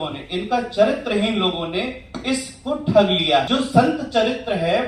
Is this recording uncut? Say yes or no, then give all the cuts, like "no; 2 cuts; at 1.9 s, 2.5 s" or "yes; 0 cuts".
no; 1 cut; at 3.5 s